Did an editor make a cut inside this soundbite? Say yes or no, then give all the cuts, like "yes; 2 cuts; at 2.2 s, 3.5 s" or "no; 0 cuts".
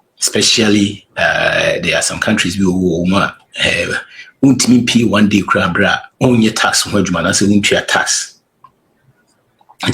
yes; 1 cut; at 6.1 s